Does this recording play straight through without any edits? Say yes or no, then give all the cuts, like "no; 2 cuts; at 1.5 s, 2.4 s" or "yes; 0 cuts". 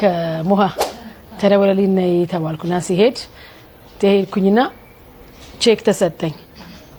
yes; 0 cuts